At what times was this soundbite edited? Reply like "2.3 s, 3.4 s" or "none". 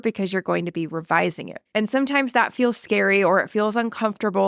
1.5 s

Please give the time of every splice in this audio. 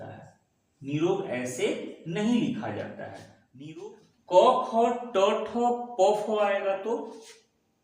3.9 s

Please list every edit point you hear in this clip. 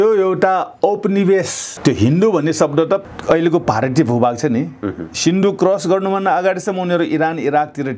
1.6 s, 3.0 s

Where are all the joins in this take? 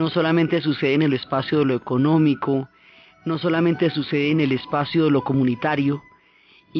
3.7 s

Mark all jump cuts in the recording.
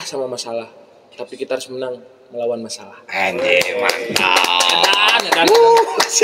none

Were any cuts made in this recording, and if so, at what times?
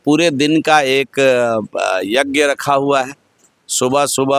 none

